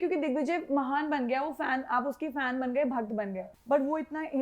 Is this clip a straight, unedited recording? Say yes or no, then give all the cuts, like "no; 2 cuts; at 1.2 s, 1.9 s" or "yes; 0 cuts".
no; 1 cut; at 3.5 s